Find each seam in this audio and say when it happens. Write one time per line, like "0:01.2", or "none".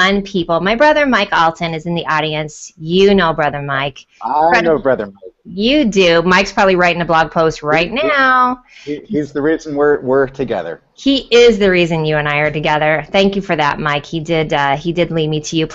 none